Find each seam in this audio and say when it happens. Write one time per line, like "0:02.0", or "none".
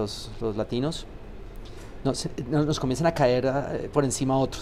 none